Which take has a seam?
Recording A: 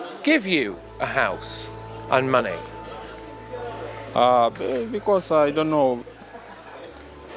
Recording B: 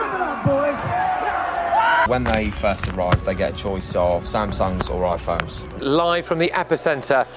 B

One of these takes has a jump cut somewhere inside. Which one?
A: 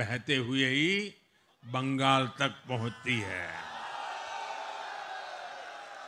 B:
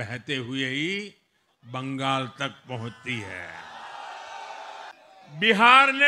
B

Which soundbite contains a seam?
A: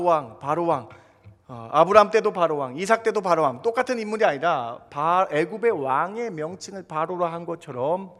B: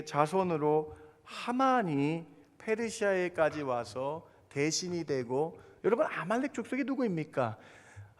B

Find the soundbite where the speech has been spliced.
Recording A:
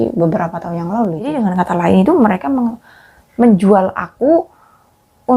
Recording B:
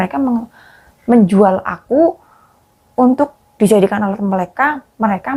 A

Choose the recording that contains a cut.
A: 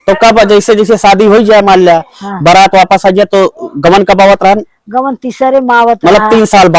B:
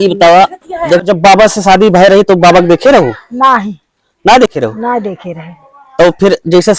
B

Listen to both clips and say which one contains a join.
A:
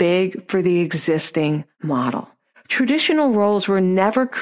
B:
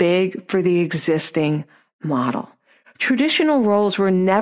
A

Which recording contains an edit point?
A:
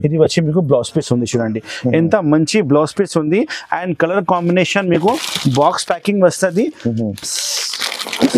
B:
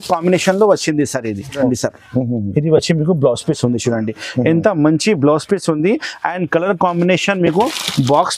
B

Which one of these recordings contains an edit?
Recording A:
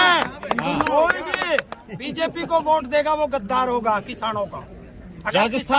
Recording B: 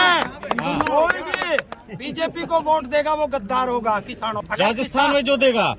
B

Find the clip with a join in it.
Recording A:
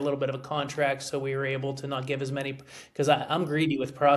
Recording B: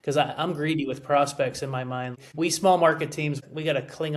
B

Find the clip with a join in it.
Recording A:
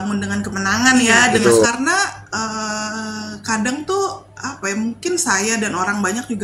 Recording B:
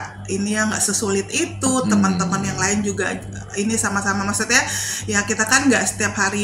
A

